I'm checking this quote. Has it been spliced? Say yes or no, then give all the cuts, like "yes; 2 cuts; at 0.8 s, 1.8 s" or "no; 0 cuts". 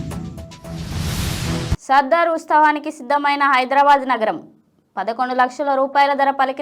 yes; 1 cut; at 1.6 s